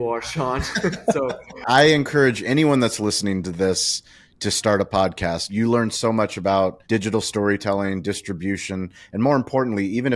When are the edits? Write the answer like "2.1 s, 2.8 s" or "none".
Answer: 1.6 s, 5.5 s, 6.8 s